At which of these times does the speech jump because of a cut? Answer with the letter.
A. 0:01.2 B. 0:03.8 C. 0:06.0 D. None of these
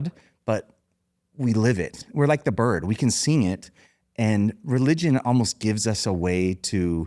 A